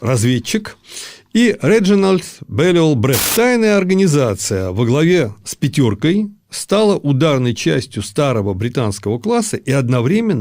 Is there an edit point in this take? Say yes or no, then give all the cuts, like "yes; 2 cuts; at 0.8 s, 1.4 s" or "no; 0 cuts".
yes; 1 cut; at 3.2 s